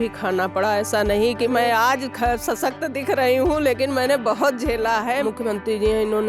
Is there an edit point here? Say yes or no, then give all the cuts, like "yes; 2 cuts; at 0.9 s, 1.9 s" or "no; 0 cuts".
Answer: yes; 1 cut; at 5.2 s